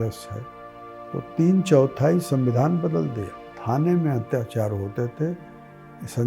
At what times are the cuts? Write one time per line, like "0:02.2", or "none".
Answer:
0:03.5